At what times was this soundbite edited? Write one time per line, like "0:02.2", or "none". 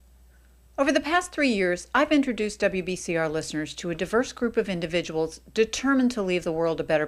none

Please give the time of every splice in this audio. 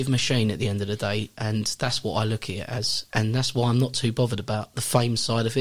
0:02.9

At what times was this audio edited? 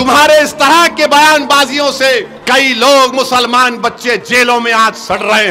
0:02.3

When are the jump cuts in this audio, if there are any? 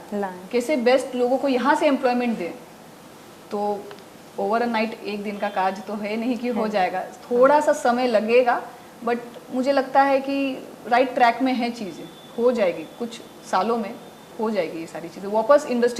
none

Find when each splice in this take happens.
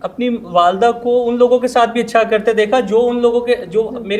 none

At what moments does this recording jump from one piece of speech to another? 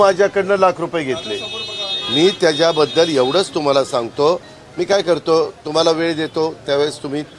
none

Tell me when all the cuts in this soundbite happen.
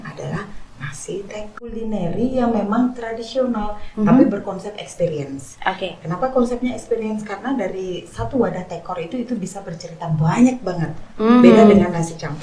0:01.8

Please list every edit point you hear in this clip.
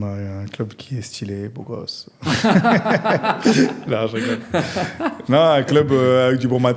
none

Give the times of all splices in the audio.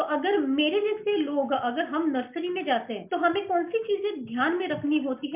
none

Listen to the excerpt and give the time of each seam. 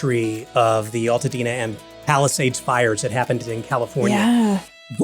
0:04.1

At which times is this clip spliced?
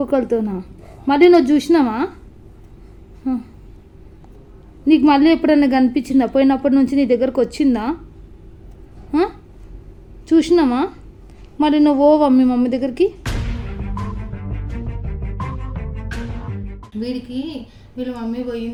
none

